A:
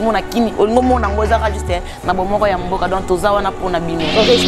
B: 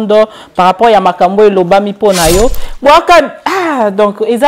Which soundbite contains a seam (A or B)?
B